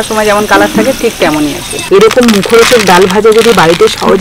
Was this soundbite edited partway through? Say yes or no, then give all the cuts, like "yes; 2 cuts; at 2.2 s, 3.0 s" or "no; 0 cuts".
yes; 1 cut; at 1.7 s